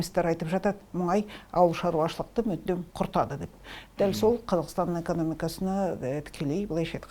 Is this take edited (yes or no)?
no